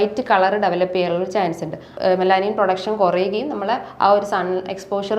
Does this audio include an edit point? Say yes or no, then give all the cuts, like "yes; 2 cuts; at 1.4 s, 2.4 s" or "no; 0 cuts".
yes; 1 cut; at 1.9 s